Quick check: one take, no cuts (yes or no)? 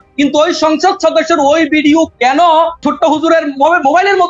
no